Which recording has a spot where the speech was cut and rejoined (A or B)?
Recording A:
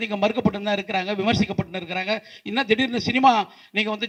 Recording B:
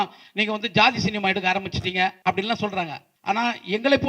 B